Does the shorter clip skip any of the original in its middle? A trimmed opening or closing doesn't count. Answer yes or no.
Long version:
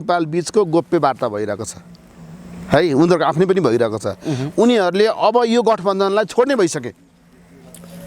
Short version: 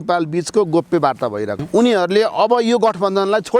yes